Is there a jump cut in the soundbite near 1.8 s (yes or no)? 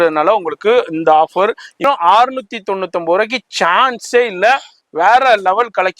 yes